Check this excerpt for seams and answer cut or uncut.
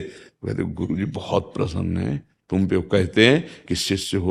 uncut